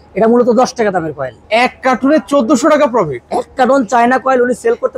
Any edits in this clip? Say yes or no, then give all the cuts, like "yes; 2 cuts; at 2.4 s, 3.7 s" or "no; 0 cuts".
yes; 1 cut; at 1.4 s